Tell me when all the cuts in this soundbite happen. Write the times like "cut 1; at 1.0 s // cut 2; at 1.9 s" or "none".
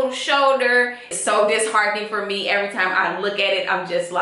cut 1; at 1.1 s